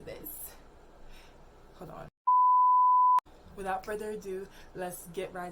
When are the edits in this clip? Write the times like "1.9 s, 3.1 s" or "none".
2.2 s, 3.2 s